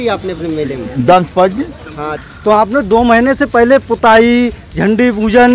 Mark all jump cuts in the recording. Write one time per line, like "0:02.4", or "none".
0:02.3